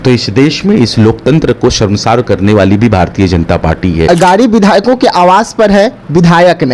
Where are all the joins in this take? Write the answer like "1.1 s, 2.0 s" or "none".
4.1 s